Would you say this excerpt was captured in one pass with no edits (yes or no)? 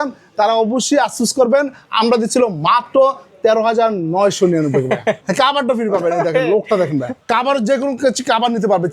no